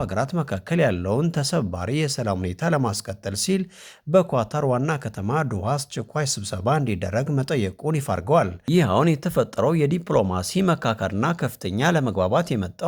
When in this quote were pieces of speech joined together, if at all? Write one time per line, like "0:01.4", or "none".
0:08.6